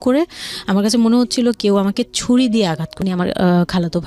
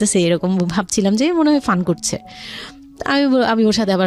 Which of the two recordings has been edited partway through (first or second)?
first